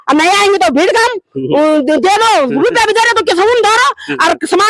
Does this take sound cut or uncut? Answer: uncut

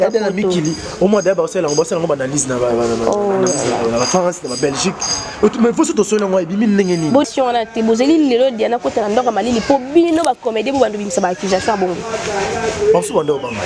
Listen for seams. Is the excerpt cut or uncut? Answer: cut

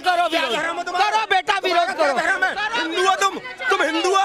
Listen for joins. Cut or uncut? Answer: uncut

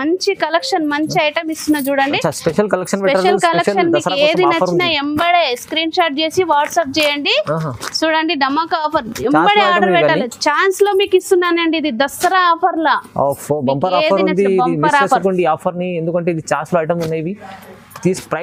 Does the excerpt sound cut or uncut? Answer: uncut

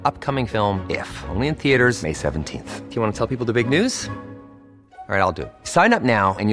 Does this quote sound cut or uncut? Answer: uncut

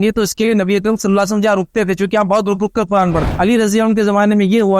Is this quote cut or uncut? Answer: cut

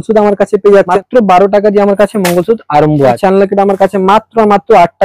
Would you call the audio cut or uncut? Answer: cut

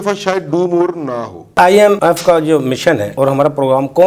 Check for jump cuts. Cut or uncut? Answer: uncut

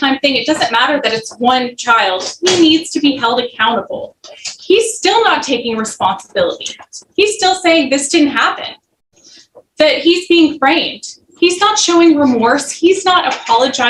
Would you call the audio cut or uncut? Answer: uncut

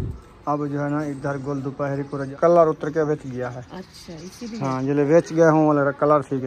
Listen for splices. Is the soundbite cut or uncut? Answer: cut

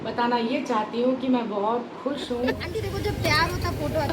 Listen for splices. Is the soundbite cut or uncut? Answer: cut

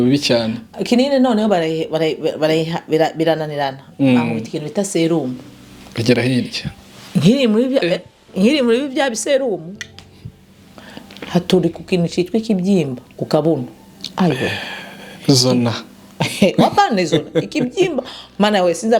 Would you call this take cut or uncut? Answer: uncut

